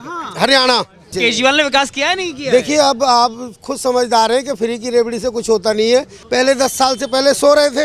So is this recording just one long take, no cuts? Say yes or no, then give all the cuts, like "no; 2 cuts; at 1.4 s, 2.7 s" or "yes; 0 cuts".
no; 2 cuts; at 1.2 s, 6.2 s